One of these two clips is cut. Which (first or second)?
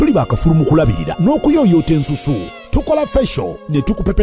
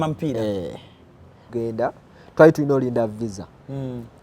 second